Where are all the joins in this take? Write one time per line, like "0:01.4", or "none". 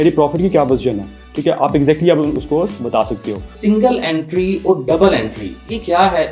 0:03.5